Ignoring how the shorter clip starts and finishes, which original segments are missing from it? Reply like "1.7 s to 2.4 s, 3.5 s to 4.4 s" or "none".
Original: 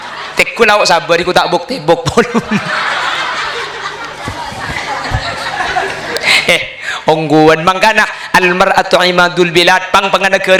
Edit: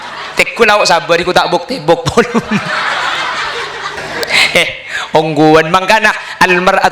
4.0 s to 5.9 s

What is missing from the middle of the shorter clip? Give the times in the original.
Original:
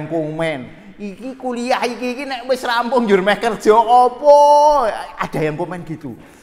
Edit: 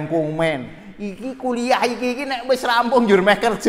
none

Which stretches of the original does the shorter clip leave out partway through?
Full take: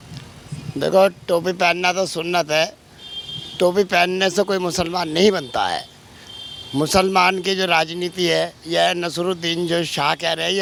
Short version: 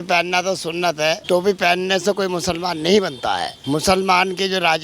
2.7 s to 3.5 s, 5.8 s to 6.6 s

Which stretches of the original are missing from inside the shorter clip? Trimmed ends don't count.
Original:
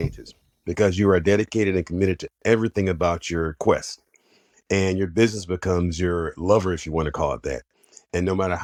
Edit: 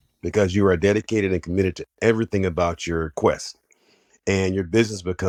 none

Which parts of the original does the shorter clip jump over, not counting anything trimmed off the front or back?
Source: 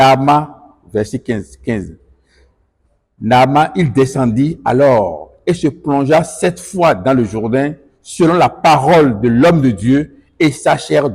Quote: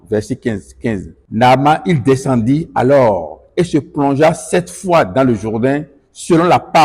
2.0 s to 3.1 s

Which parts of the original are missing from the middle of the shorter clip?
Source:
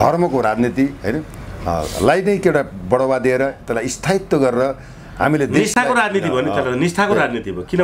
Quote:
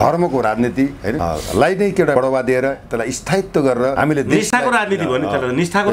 1.2 s to 1.7 s, 2.6 s to 2.9 s, 4.7 s to 5.2 s

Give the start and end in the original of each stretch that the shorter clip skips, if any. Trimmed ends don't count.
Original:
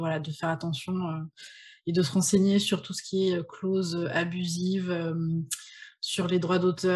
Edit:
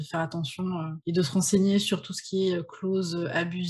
1.2 s to 1.7 s

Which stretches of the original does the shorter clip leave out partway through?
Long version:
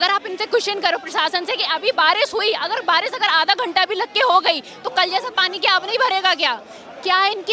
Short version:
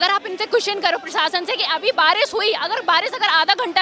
none

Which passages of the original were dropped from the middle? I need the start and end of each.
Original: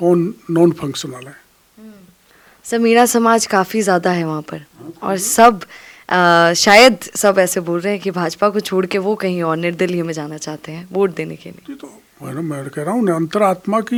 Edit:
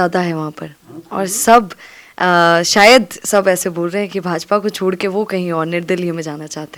none

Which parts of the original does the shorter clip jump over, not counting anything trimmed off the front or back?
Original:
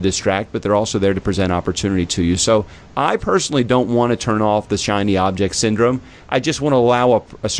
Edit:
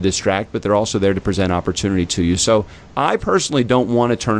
none

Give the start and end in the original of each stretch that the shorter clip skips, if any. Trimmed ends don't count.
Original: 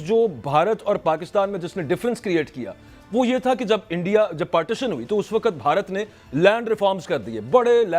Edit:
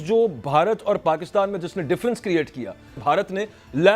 3.0 s to 5.6 s

